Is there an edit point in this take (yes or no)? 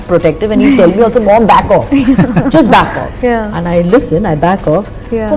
no